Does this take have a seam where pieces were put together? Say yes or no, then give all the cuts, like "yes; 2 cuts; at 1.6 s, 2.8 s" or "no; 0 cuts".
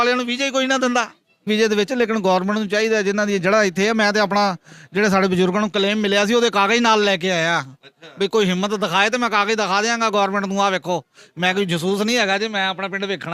yes; 1 cut; at 1.5 s